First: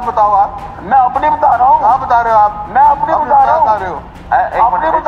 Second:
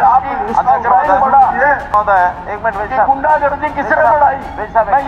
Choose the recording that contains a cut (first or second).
second